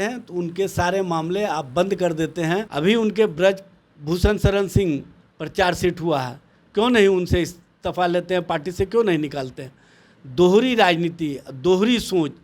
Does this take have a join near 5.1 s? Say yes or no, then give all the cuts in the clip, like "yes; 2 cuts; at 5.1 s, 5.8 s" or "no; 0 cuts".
no; 1 cut; at 2.7 s